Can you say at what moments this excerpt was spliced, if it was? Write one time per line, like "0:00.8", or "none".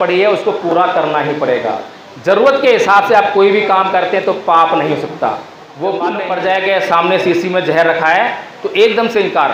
0:06.2